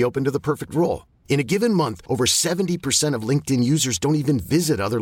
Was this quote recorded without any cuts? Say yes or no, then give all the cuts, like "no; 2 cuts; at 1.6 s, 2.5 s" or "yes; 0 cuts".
yes; 0 cuts